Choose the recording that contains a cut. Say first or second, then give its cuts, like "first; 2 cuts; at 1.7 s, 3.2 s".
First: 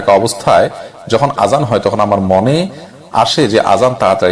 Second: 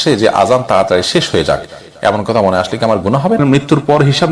second; 1 cut; at 3.4 s